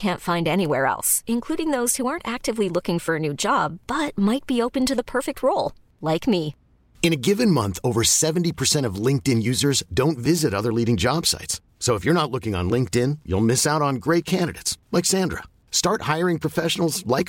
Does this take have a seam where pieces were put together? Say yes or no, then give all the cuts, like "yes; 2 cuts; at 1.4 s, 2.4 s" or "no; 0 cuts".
no; 0 cuts